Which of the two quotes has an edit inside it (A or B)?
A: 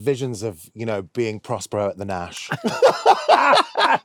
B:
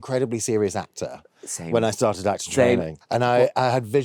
B